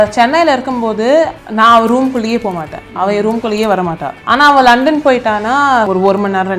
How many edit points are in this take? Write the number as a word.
three